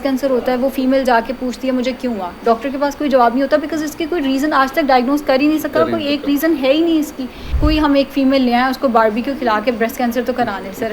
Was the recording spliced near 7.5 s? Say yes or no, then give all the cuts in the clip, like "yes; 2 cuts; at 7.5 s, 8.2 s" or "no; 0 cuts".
yes; 1 cut; at 7.5 s